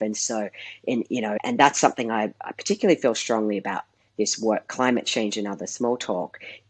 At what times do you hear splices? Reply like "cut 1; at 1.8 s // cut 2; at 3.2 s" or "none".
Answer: cut 1; at 1.4 s